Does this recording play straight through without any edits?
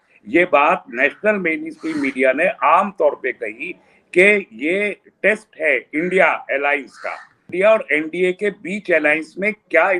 no; 1 cut; at 7.5 s

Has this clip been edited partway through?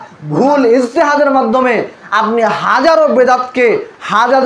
no; 0 cuts

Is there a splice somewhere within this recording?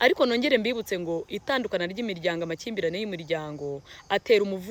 no; 0 cuts

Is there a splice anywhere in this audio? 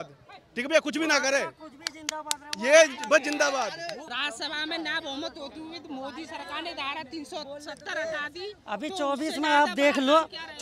yes; 1 cut; at 4.0 s

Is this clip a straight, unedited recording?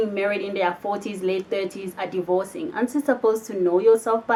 yes; 0 cuts

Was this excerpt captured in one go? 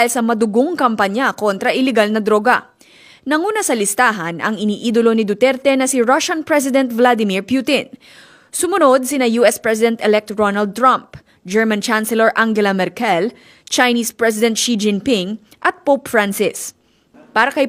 yes; 0 cuts

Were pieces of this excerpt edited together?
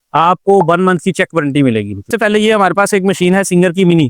yes; 1 cut; at 2.1 s

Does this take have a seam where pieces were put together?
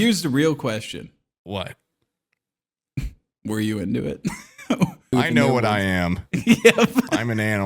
yes; 1 cut; at 5.1 s

